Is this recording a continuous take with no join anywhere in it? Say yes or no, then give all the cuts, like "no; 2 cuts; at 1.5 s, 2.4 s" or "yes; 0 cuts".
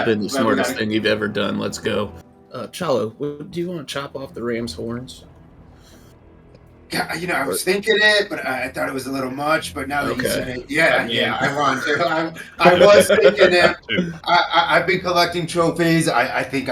no; 1 cut; at 2.3 s